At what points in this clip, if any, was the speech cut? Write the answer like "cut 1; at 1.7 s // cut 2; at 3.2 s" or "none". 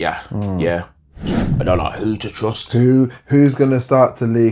cut 1; at 1.4 s